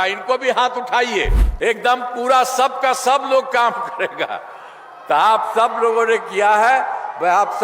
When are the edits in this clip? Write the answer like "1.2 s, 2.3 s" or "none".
1.4 s